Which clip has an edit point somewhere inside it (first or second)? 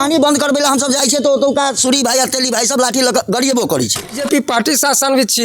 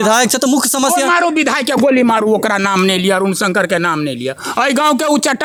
first